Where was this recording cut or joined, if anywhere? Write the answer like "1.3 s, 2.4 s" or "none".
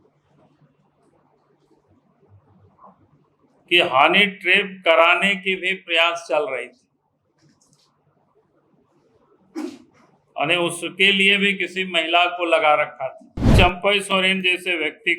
13.5 s